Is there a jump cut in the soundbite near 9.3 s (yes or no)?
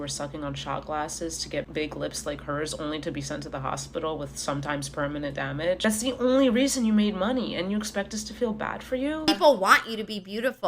yes